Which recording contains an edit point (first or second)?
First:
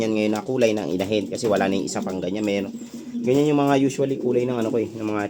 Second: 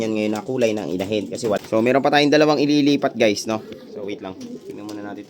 second